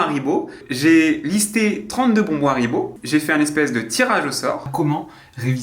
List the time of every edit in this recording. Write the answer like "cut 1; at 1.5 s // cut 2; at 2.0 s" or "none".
cut 1; at 4.7 s